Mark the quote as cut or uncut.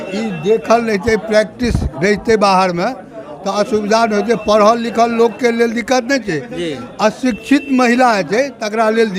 uncut